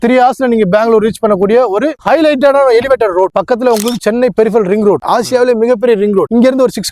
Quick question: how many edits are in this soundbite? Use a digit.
2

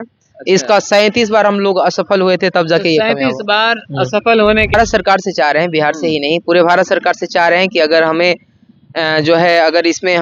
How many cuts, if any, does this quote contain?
1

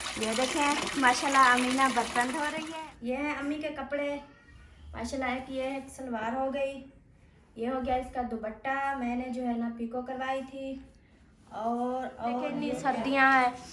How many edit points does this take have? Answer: 2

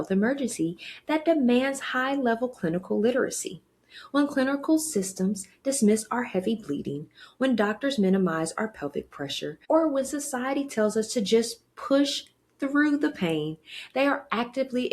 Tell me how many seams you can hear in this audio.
1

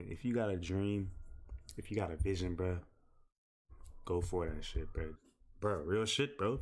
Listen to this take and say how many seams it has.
1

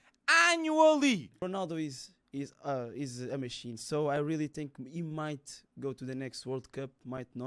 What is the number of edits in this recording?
1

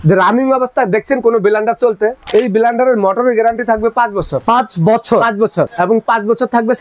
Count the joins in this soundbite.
3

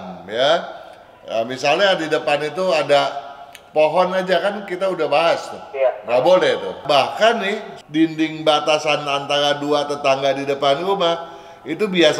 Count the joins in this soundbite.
2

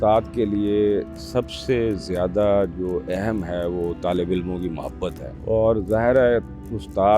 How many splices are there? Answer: 1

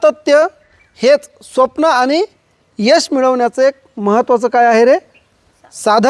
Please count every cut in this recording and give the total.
0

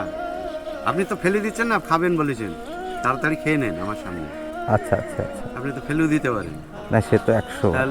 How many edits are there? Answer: 0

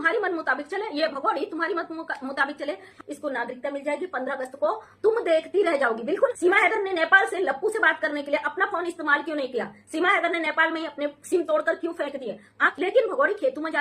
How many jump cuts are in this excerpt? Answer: 3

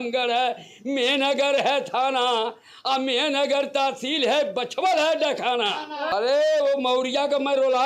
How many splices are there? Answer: 1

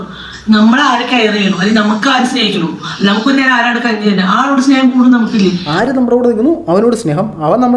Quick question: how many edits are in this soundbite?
1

